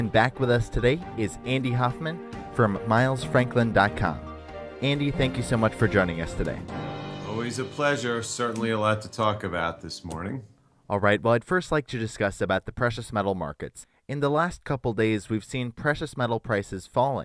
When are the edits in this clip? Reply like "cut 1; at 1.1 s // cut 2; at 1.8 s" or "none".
none